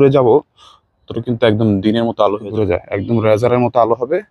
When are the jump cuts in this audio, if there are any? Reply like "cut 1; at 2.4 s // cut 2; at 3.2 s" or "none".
cut 1; at 2.6 s